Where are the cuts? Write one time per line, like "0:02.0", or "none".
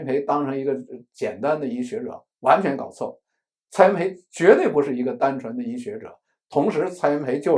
none

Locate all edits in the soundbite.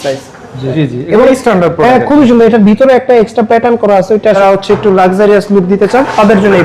0:00.8
0:04.4

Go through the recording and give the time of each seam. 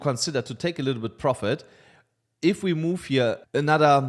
none

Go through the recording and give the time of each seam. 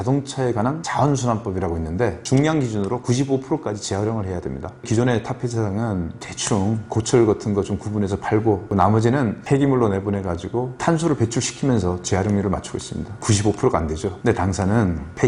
0:00.8
0:02.2
0:08.7
0:10.8

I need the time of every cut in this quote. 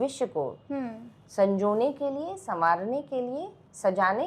none

